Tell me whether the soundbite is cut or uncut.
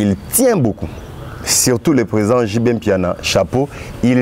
uncut